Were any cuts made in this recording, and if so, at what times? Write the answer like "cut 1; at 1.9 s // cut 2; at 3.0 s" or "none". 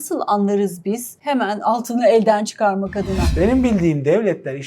cut 1; at 1.1 s // cut 2; at 3.2 s